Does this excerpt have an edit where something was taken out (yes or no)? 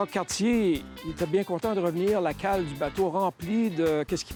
no